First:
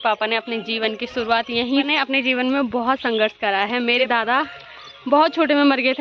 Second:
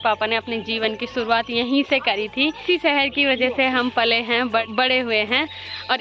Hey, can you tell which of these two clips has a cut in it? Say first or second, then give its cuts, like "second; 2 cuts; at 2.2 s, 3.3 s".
first; 2 cuts; at 1.9 s, 4.1 s